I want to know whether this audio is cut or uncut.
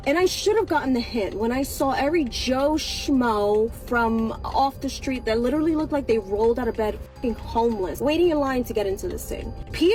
uncut